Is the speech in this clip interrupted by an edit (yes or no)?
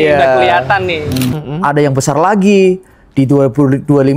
yes